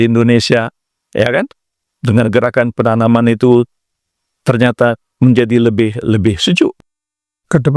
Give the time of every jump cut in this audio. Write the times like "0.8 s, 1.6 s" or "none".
6.8 s

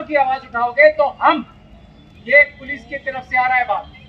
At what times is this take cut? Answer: none

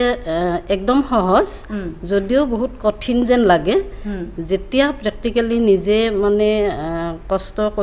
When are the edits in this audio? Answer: none

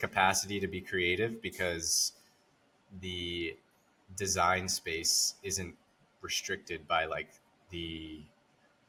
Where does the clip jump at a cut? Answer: none

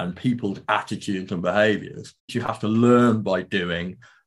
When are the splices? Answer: 2.3 s

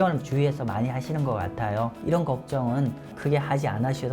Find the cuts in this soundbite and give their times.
2.0 s, 3.1 s

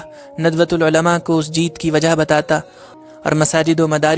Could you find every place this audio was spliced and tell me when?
2.8 s

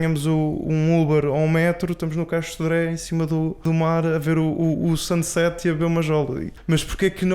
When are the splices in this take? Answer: 3.6 s, 6.5 s

